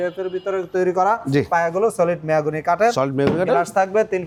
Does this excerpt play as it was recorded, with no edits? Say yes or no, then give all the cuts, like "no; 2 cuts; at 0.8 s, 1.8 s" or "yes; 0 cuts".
yes; 0 cuts